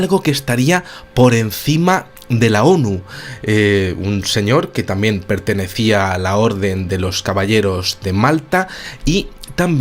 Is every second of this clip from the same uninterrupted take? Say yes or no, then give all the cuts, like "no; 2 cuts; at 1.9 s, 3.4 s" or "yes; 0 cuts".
yes; 0 cuts